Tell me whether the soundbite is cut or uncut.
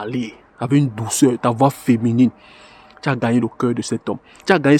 uncut